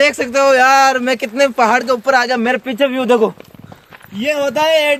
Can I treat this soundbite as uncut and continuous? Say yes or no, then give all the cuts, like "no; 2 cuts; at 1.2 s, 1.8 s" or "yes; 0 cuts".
yes; 0 cuts